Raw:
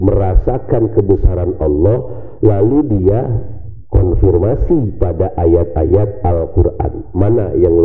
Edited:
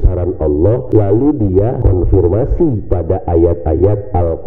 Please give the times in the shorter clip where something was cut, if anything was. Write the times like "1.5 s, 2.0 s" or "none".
0.8 s, 1.8 s